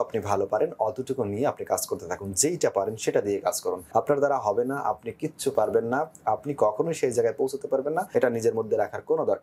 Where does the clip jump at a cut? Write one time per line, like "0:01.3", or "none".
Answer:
0:03.8
0:08.1